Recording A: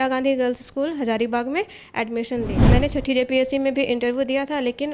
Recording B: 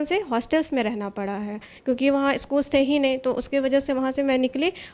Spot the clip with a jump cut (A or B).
A